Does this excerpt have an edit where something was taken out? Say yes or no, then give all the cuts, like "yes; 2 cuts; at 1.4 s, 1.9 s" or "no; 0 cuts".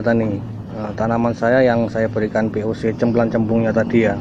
no; 0 cuts